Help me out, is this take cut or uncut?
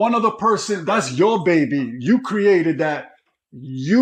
uncut